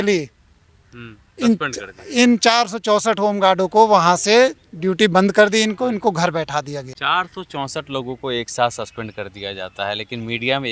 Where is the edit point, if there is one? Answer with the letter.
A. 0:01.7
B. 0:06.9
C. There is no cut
B